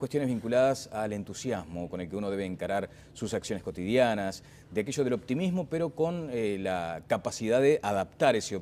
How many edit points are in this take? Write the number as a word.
one